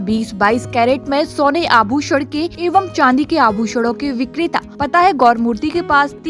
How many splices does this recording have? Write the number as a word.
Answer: two